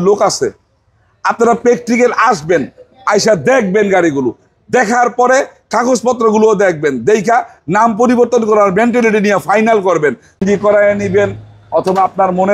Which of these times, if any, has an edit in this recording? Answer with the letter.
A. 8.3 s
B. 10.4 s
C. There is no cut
B